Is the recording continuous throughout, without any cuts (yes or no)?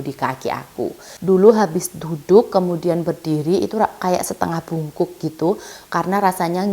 no